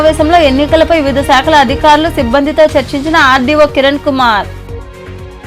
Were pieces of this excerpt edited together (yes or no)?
no